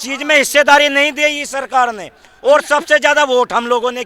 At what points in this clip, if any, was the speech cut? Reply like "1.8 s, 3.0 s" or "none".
none